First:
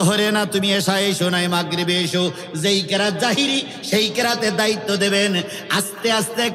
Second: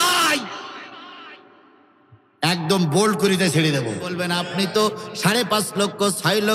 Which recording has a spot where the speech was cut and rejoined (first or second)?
second